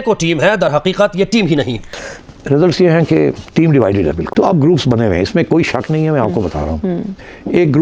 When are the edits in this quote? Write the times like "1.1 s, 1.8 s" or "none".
2.0 s, 4.2 s